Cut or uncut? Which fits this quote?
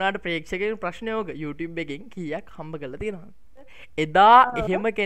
cut